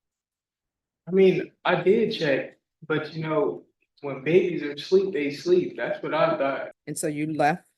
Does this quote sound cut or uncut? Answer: cut